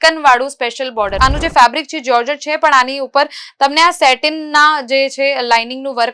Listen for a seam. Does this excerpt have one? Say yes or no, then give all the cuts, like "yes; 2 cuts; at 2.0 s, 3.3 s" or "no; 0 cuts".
yes; 1 cut; at 1.1 s